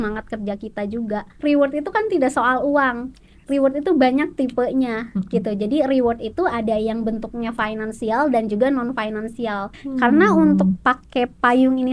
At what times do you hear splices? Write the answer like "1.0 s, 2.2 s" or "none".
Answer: 1.3 s, 9.8 s